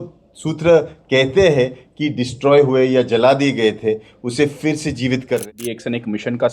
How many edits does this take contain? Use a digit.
1